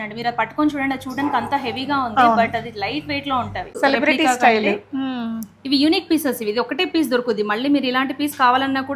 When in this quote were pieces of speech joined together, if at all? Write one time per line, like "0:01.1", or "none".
0:03.7